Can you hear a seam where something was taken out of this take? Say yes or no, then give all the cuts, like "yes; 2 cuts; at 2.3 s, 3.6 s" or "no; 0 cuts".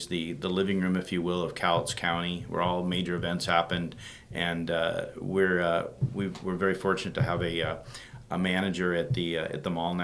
no; 0 cuts